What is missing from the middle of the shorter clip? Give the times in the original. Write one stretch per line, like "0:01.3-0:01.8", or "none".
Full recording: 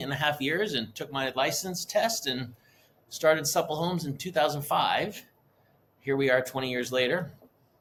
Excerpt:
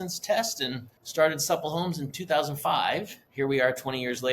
0:02.6-0:03.0
0:05.2-0:05.9

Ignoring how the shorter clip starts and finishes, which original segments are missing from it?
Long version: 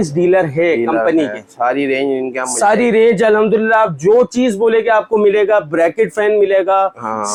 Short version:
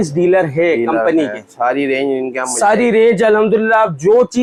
none

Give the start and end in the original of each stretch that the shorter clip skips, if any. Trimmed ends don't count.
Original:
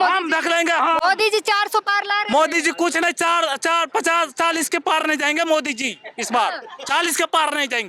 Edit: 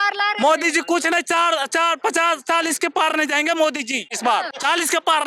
0:06.2-0:06.6

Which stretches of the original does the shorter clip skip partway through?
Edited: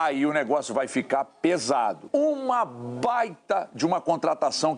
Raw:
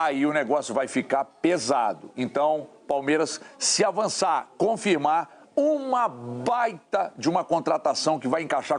0:02.0-0:05.4

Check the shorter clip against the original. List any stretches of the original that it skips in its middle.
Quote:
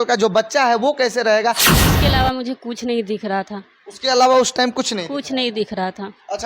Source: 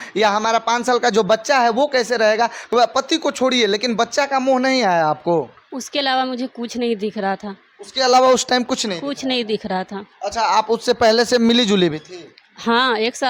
0:02.6-0:05.6

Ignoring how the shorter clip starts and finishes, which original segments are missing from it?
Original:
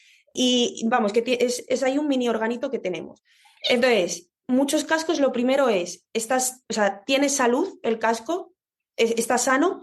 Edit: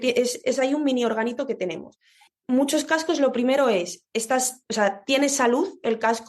0:03.5-0:04.2

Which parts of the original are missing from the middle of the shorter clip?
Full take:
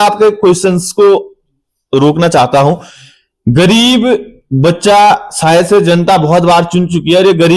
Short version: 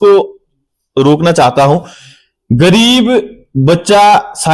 none

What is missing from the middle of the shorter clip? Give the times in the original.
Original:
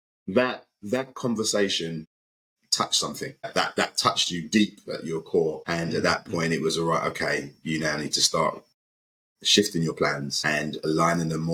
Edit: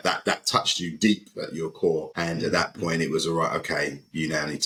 none

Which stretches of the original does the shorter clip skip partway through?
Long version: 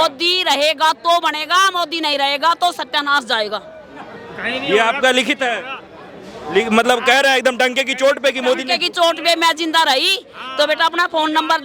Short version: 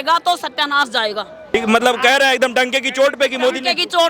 0:03.9-0:06.6

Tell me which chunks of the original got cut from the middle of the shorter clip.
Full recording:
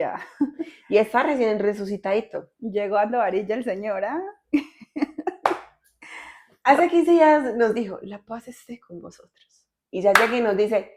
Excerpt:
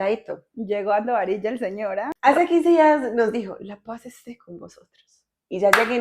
0:04.2-0:06.5

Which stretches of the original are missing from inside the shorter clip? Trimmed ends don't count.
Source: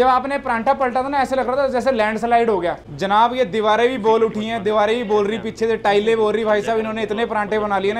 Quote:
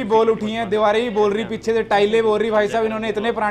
none

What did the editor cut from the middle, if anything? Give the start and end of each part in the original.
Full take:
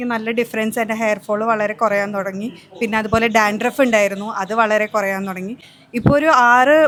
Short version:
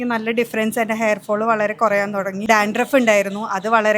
0:02.4-0:03.3

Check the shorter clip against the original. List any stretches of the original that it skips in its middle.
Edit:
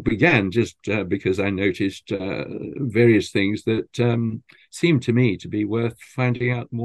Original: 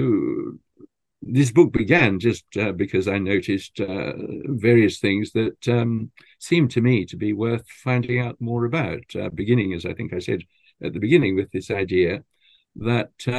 none

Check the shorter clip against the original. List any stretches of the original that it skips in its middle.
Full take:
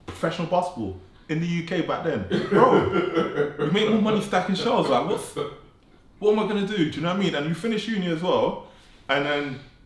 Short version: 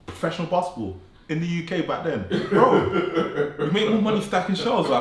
none

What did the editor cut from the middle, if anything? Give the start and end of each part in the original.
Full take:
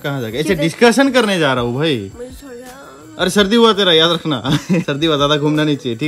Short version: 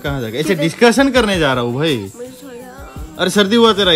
none

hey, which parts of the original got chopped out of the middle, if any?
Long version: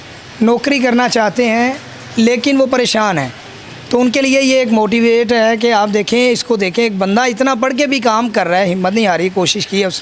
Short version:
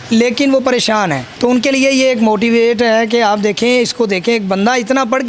0:03.3-0:03.7

